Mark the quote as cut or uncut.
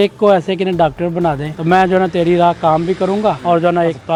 uncut